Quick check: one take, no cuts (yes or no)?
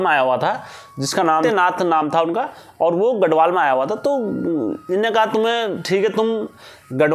no